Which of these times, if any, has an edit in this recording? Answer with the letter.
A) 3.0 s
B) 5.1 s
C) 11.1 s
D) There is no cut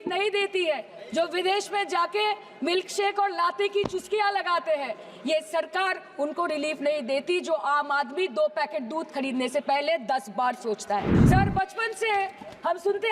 C